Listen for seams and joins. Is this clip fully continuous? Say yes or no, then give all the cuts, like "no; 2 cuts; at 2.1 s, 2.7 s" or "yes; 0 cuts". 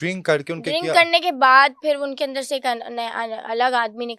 yes; 0 cuts